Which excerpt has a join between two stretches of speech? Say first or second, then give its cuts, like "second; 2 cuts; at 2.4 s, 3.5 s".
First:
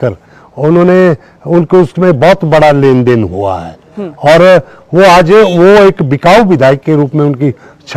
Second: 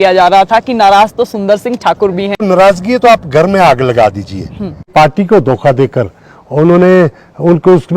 second; 2 cuts; at 2.4 s, 4.9 s